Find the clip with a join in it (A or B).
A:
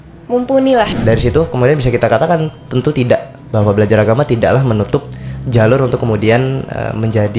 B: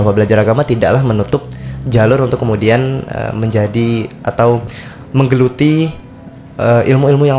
A